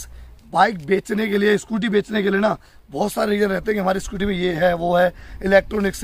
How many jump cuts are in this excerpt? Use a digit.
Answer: 0